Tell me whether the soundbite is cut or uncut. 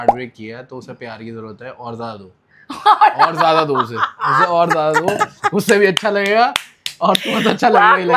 uncut